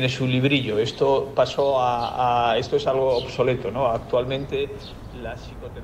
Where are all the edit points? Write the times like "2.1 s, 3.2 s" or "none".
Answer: none